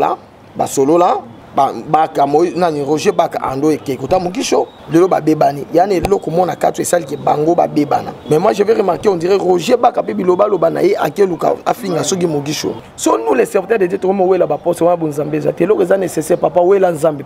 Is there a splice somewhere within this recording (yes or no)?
yes